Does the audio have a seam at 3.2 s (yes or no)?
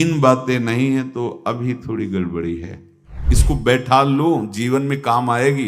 yes